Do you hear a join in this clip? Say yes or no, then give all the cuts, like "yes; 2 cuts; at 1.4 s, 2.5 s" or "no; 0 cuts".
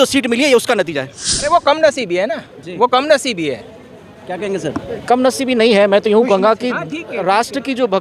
yes; 1 cut; at 1.4 s